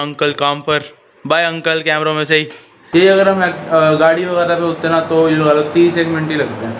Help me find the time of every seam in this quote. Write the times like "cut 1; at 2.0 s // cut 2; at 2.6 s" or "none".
cut 1; at 2.8 s